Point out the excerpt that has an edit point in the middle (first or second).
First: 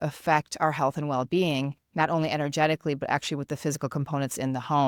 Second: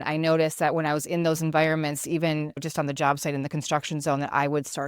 second